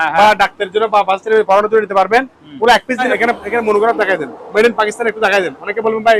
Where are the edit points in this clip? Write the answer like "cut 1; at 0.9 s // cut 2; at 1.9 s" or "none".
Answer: cut 1; at 3.1 s